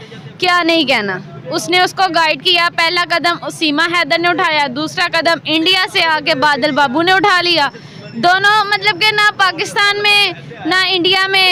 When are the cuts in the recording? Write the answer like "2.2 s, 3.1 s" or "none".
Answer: none